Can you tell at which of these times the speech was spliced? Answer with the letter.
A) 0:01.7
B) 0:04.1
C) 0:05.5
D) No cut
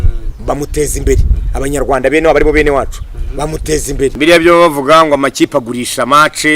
B